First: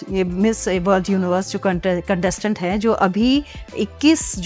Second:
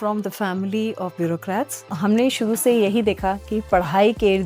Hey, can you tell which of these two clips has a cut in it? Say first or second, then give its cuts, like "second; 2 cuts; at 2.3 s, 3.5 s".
second; 1 cut; at 1.9 s